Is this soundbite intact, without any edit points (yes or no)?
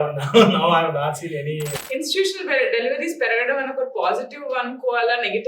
no